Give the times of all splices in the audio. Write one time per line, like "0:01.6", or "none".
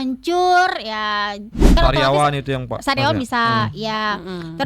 0:01.7